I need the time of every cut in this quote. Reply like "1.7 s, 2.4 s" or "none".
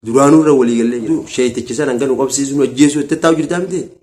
1.0 s